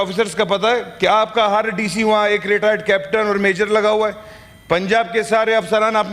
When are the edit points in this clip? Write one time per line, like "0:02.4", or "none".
none

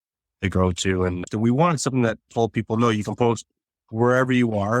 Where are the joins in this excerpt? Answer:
0:01.2

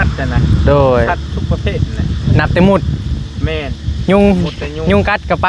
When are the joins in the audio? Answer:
none

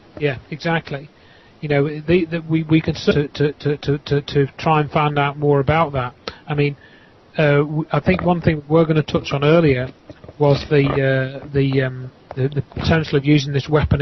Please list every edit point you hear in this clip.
none

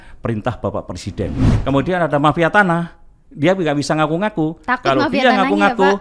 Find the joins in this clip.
0:01.5

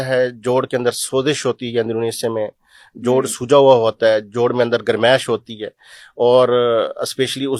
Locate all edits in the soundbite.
none

